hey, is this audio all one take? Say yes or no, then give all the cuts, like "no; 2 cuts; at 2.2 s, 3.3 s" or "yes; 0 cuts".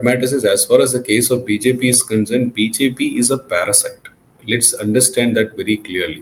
yes; 0 cuts